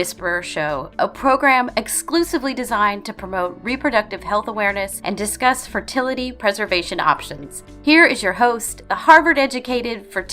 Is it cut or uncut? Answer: cut